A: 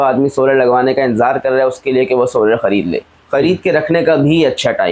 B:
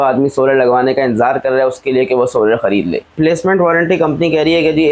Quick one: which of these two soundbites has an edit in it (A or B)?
B